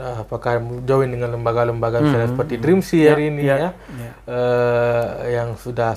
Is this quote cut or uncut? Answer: uncut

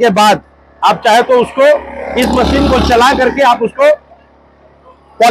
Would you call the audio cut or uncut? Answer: uncut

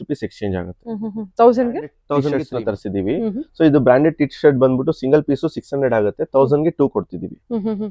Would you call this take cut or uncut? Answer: cut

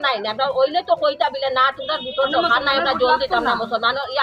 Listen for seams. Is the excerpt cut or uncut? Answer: uncut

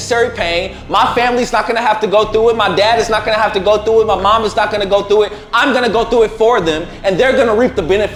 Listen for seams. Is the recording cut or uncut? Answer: uncut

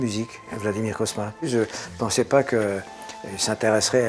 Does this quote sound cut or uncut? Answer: cut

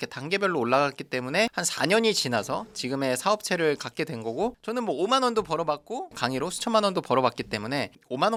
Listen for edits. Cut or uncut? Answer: uncut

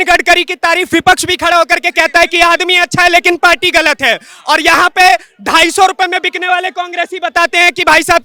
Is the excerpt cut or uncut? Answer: uncut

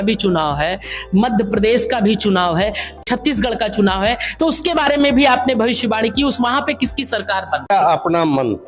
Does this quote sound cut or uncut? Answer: cut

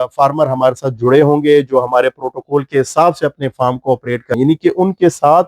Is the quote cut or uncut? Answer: cut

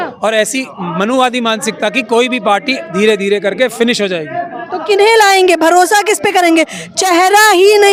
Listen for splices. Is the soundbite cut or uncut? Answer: uncut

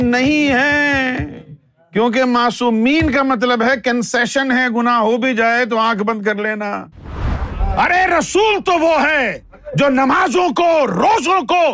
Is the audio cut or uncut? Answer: cut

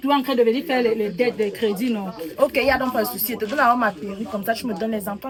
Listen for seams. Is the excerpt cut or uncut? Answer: uncut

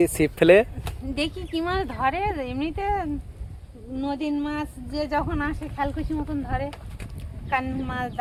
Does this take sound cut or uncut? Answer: uncut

